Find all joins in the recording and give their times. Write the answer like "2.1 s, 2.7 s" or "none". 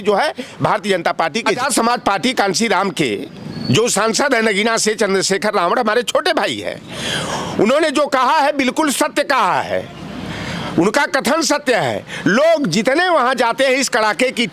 1.6 s